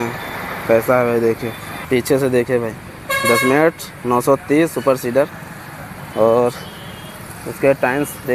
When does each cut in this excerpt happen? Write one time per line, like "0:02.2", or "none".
none